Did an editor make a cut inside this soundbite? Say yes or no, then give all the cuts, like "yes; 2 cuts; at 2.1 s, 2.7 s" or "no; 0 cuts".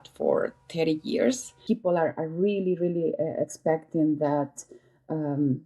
yes; 1 cut; at 1.6 s